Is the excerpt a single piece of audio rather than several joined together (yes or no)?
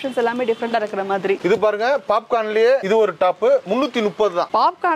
yes